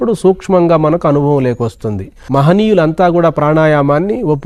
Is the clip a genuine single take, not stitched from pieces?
no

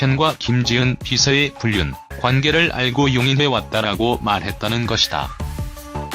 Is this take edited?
yes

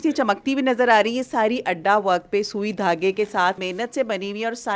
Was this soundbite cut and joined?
yes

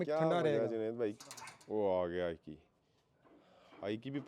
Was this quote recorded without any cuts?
no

